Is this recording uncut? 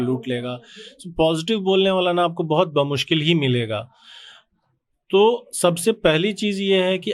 yes; 0 cuts

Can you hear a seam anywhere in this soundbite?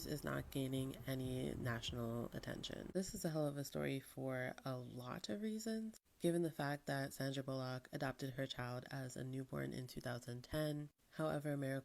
yes; 1 cut; at 2.9 s

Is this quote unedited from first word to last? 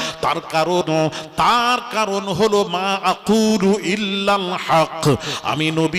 yes; 0 cuts

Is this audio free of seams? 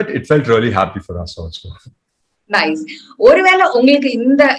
yes; 0 cuts

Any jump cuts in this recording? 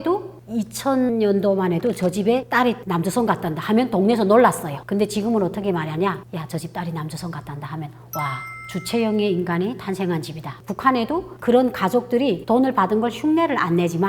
yes; 4 cuts; at 1.1 s, 4.7 s, 8.5 s, 10.7 s

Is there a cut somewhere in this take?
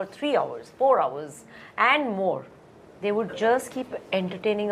no; 0 cuts

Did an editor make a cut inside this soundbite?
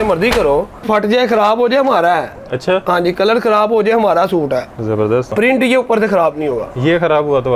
yes; 2 cuts; at 0.8 s, 5.3 s

